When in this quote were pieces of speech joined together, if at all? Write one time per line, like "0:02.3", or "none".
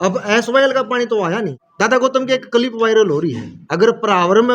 0:01.6
0:03.4